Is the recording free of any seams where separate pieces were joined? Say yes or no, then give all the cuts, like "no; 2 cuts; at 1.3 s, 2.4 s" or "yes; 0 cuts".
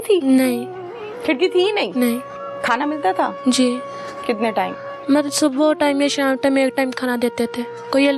yes; 0 cuts